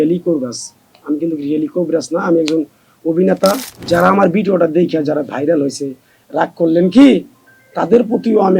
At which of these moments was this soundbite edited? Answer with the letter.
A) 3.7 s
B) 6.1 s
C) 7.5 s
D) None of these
A